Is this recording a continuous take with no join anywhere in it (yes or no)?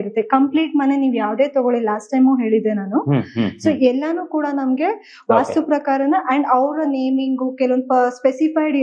yes